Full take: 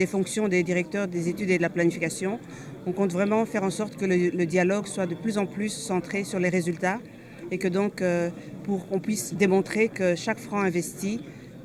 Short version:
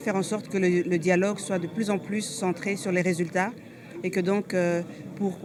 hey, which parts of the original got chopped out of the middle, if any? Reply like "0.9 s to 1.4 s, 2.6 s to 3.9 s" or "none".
none